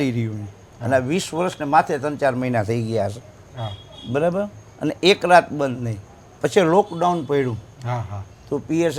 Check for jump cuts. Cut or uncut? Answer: uncut